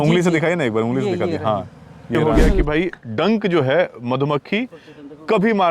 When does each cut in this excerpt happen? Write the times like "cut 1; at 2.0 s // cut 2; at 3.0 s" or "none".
cut 1; at 2.2 s